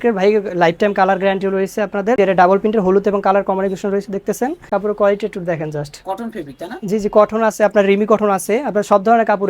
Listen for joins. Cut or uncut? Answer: cut